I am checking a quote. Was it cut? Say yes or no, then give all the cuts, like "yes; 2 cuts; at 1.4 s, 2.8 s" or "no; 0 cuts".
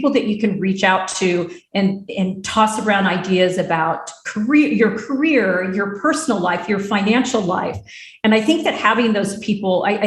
no; 0 cuts